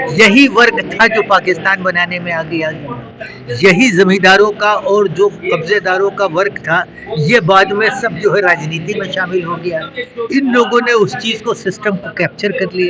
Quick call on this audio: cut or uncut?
uncut